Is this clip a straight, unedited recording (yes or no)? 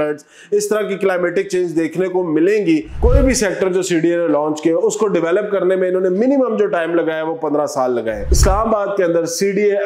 no